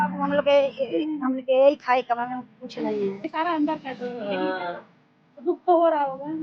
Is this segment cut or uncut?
cut